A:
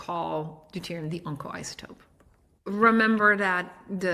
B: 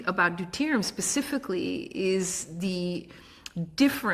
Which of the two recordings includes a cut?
A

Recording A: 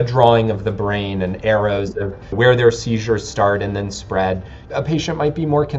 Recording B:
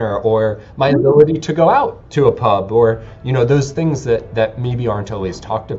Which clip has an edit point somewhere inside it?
A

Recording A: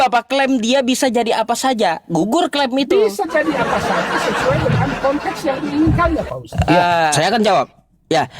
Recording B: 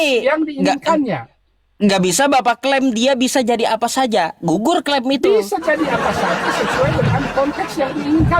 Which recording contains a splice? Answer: A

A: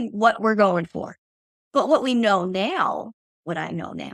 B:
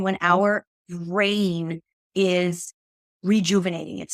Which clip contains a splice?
A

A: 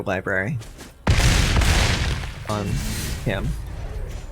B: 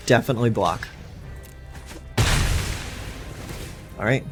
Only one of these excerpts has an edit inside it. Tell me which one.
A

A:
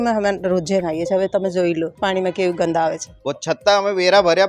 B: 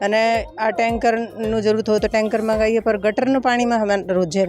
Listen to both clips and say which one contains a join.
A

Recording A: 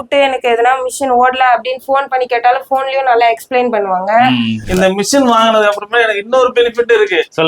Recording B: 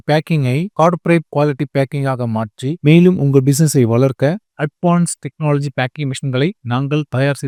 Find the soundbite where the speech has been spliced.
A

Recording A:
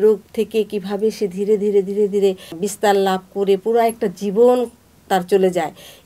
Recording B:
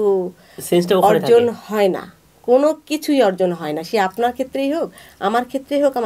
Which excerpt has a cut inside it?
A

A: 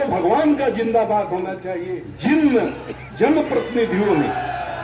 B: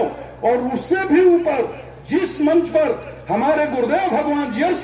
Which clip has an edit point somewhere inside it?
A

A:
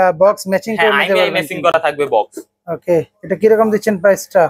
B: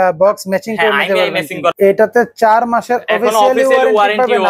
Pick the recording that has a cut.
B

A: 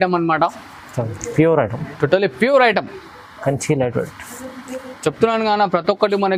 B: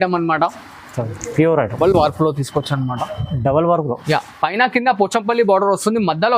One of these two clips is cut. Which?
B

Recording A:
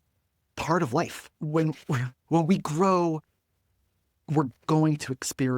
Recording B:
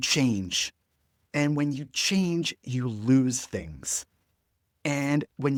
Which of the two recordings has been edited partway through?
A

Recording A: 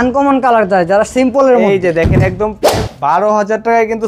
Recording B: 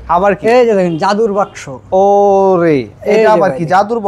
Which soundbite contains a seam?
A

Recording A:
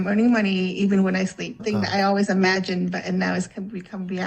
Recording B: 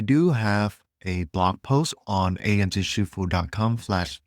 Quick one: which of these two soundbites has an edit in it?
A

